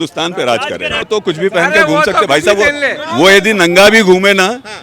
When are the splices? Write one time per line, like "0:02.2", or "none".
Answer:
0:01.1